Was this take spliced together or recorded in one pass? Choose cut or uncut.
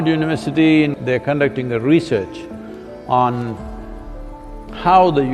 cut